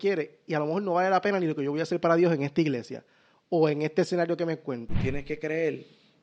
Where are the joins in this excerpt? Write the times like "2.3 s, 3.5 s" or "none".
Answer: 4.9 s